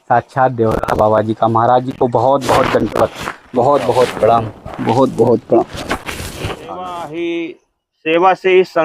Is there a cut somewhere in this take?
yes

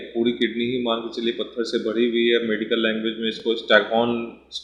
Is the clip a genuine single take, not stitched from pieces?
yes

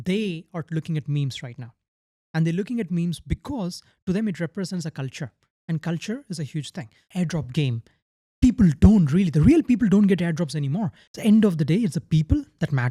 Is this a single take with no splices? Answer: no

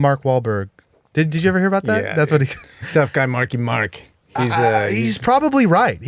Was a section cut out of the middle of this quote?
yes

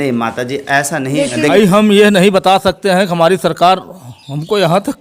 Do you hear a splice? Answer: yes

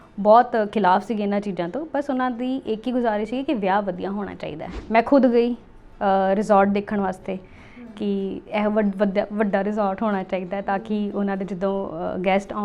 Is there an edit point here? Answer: yes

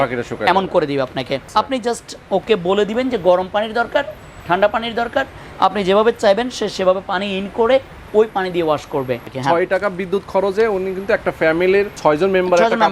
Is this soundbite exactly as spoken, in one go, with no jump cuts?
no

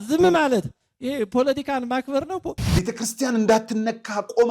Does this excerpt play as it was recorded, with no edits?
no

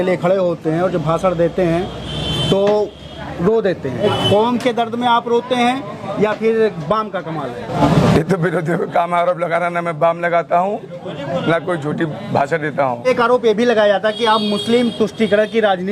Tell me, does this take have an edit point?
yes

